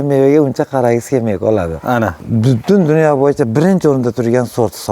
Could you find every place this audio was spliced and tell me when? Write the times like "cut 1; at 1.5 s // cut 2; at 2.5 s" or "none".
cut 1; at 2.2 s